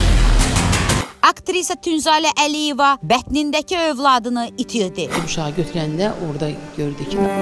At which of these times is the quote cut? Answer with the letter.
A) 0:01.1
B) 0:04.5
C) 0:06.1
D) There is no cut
A